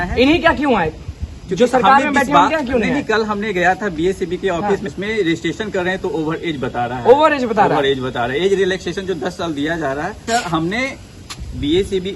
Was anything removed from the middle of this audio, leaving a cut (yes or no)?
yes